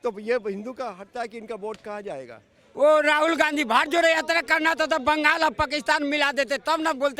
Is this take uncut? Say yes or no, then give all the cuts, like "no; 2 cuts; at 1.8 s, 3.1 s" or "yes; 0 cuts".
no; 1 cut; at 2.7 s